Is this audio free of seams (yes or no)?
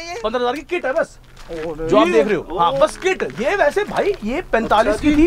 yes